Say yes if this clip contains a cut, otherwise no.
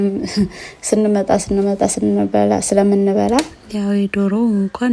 yes